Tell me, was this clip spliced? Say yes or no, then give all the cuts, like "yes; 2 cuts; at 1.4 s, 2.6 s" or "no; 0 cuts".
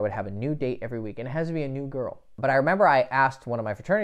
yes; 1 cut; at 2.3 s